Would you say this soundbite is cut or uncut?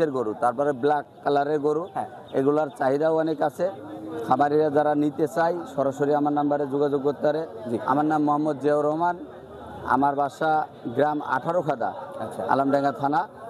uncut